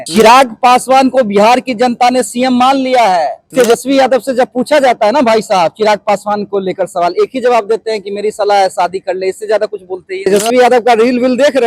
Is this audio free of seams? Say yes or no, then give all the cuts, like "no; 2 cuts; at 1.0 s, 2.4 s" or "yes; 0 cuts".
no; 2 cuts; at 3.5 s, 10.3 s